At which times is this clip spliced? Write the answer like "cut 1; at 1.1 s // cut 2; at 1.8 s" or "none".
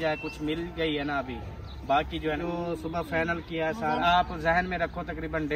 cut 1; at 2.4 s // cut 2; at 4.0 s

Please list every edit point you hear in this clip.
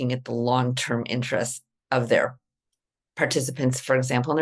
none

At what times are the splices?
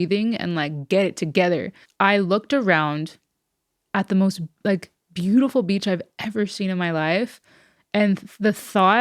cut 1; at 1.8 s

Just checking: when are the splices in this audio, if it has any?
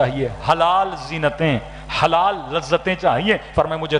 none

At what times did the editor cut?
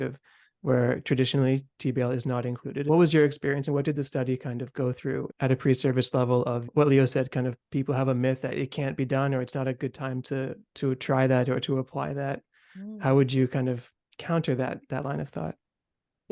cut 1; at 2.8 s // cut 2; at 5.3 s // cut 3; at 6.7 s

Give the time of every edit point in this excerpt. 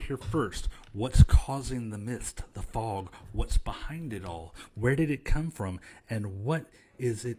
none

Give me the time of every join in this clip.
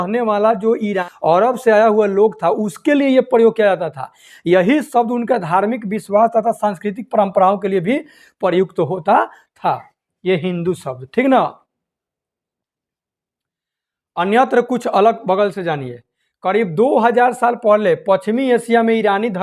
cut 1; at 1.0 s

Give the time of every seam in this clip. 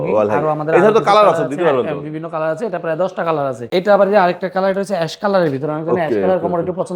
cut 1; at 3.6 s

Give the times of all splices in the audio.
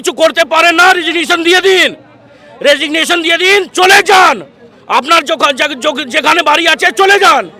none

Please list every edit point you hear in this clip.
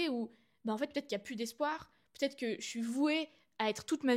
none

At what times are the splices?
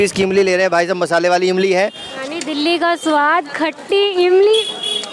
cut 1; at 2.1 s

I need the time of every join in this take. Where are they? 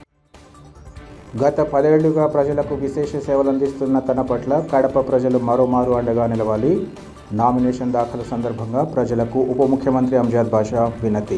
cut 1; at 1.1 s

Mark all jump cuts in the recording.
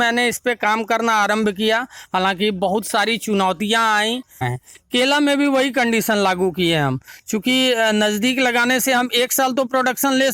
cut 1; at 4.5 s

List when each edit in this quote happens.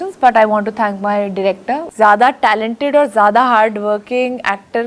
cut 1; at 1.9 s

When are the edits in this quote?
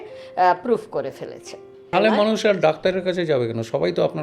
cut 1; at 1.9 s

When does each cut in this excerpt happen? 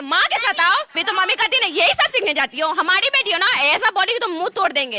cut 1; at 1.0 s

